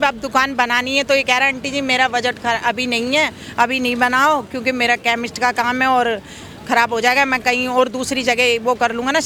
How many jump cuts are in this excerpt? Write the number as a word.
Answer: zero